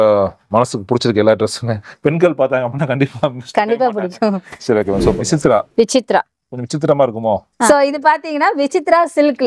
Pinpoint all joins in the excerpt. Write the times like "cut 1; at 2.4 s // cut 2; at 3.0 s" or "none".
cut 1; at 5.2 s // cut 2; at 7.7 s